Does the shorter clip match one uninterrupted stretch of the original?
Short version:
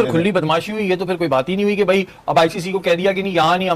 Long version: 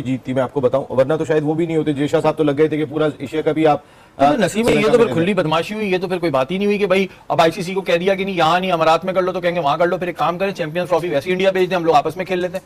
yes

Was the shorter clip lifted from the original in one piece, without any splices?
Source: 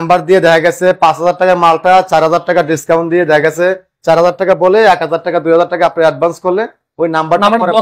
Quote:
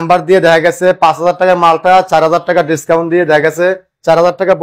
yes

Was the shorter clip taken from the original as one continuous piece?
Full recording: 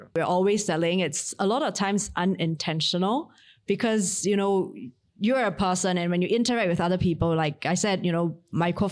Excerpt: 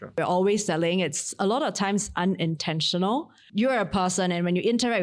no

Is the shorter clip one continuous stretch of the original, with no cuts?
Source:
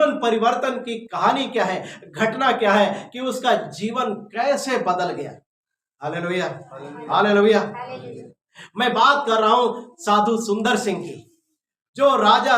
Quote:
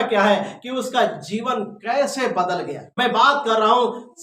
no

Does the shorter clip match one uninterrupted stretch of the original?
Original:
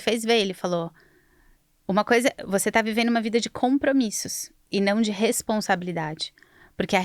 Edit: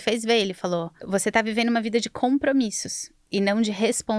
no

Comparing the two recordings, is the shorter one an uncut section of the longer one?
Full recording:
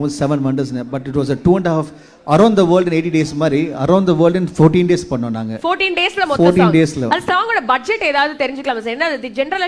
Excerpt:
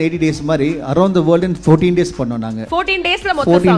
yes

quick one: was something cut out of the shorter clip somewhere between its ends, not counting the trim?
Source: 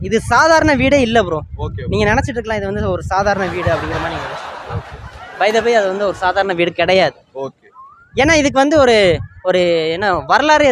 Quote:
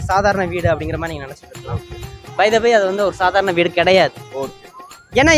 no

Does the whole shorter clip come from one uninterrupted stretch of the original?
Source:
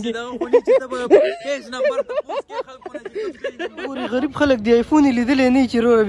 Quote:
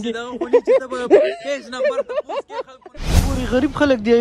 no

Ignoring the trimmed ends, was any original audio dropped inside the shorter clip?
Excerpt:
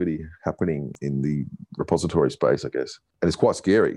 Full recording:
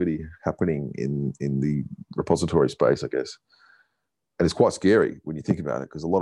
yes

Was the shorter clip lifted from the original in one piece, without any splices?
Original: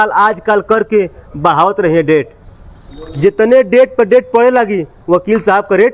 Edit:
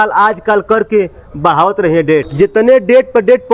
no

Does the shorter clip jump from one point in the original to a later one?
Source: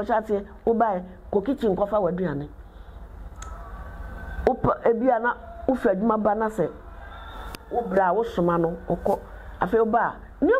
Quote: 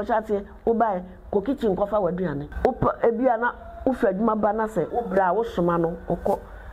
yes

